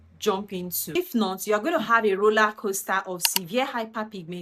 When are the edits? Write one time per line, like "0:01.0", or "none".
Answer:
0:00.9